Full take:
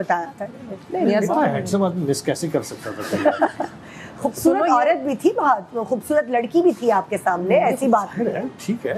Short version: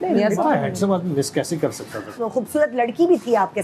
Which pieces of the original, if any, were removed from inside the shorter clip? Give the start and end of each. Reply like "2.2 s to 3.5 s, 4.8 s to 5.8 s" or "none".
3.0 s to 5.7 s